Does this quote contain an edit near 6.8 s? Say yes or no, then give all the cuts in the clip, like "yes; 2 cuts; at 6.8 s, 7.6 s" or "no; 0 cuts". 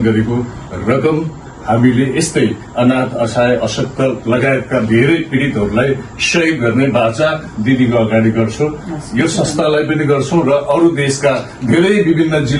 no; 0 cuts